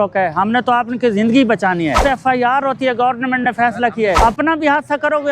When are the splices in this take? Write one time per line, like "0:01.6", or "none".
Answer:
0:02.0
0:04.2